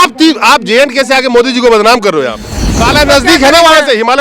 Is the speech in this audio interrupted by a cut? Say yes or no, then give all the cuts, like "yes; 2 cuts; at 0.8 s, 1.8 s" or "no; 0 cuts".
yes; 1 cut; at 2.8 s